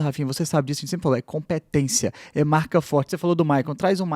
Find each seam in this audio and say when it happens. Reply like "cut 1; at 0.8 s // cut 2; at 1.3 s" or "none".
none